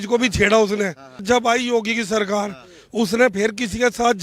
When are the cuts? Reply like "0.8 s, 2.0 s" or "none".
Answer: 1.2 s